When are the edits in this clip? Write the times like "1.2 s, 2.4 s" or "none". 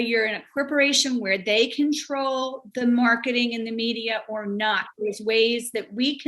none